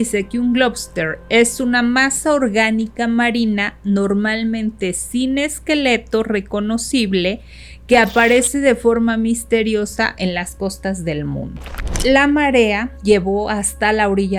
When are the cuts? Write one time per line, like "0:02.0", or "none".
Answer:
0:12.0
0:12.9